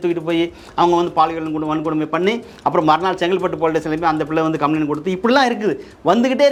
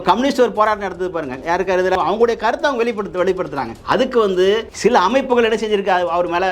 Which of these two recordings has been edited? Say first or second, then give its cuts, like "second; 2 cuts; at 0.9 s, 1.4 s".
second; 1 cut; at 2.0 s